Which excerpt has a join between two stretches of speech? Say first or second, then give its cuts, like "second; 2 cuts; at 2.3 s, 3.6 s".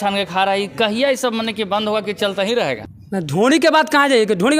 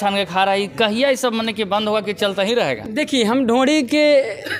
first; 1 cut; at 2.8 s